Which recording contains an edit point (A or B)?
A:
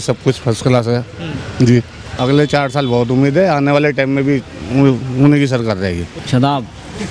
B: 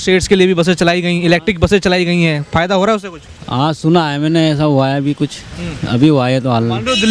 A